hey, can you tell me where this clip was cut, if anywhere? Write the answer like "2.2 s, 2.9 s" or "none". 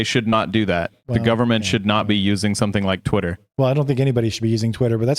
none